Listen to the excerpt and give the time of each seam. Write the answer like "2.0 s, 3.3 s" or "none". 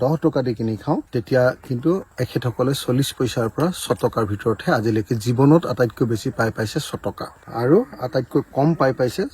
1.1 s, 7.3 s